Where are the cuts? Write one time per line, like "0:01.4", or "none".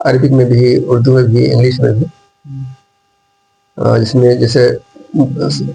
none